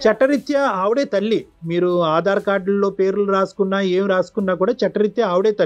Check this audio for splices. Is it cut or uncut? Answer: uncut